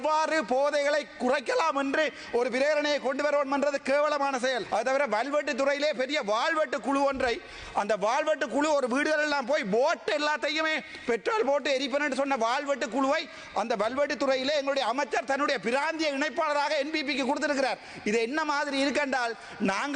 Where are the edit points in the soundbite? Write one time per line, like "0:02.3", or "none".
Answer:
0:04.6